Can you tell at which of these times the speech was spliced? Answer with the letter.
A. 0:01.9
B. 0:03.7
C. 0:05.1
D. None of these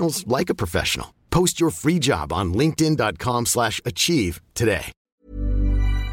C